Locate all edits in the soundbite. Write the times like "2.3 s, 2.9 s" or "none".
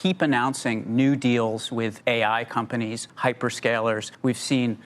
2.0 s, 3.1 s